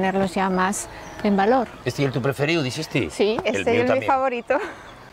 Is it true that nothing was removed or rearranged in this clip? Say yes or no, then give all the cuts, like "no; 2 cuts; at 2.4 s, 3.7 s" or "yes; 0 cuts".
yes; 0 cuts